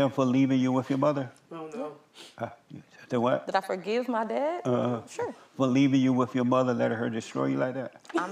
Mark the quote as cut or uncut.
uncut